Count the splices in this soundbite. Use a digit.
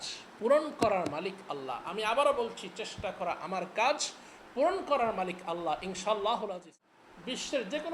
1